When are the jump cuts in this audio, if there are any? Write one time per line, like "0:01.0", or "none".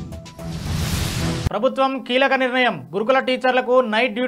0:01.4